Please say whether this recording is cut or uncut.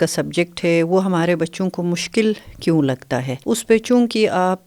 uncut